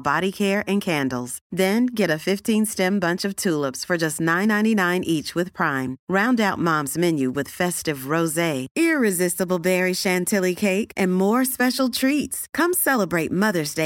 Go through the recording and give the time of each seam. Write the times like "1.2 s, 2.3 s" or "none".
none